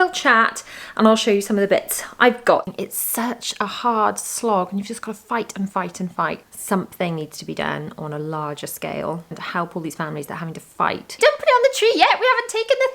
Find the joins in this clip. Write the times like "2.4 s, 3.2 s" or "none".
2.7 s, 9.4 s, 11.1 s